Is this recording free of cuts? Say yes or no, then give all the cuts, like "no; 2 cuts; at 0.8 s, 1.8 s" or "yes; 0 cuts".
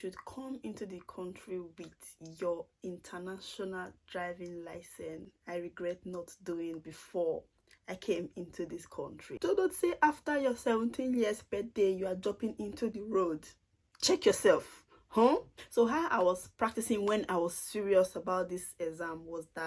no; 3 cuts; at 5.3 s, 9.2 s, 15.6 s